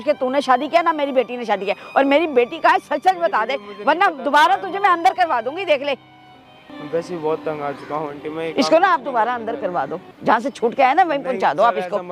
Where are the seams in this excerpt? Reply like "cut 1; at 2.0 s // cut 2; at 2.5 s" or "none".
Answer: none